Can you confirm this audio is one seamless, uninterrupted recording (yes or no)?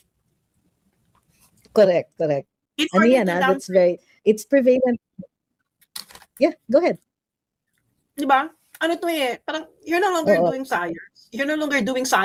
yes